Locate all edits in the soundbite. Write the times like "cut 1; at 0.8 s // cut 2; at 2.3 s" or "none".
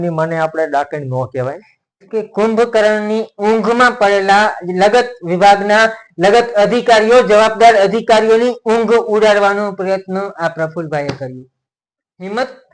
cut 1; at 2.0 s